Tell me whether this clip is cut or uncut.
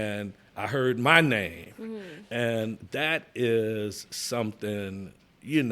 cut